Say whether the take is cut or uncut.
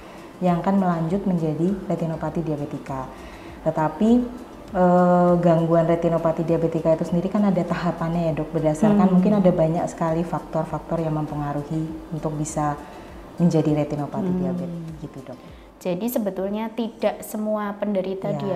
uncut